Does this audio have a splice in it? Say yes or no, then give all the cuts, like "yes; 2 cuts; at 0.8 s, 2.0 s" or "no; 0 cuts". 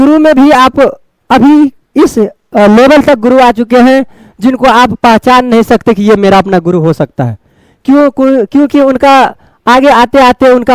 no; 0 cuts